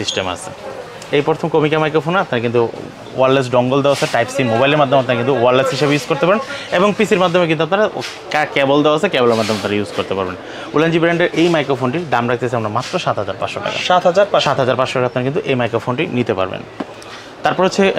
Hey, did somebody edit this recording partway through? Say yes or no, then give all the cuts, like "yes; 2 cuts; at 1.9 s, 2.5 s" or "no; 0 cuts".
no; 0 cuts